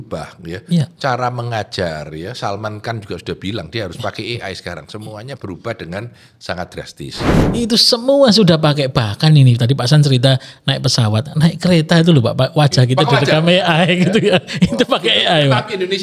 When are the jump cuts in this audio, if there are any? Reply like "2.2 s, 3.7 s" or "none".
7.4 s